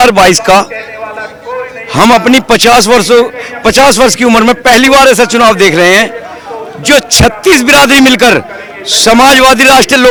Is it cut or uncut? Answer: uncut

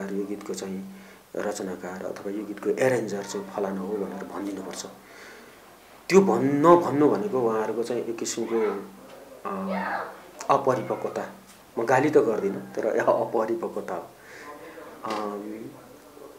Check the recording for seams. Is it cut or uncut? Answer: uncut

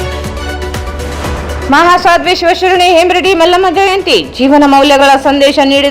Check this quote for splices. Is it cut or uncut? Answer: cut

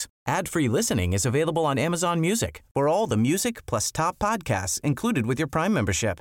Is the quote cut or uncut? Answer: uncut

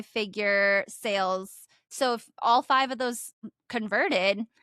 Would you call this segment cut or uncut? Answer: cut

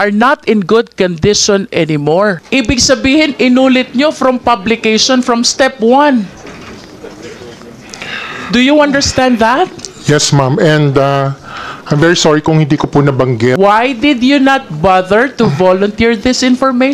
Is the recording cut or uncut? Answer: cut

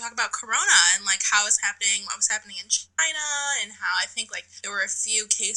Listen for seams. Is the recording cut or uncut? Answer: uncut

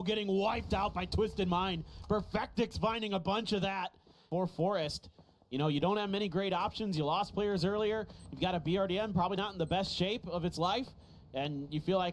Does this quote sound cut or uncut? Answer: uncut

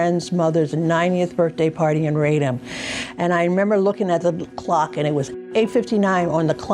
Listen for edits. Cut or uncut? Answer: cut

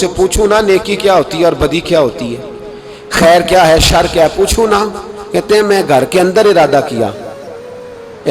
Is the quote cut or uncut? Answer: uncut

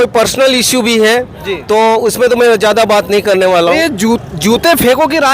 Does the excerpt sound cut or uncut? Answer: cut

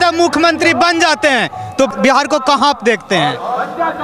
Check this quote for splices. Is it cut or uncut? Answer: cut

